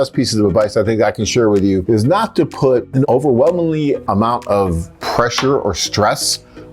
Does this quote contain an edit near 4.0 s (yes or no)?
yes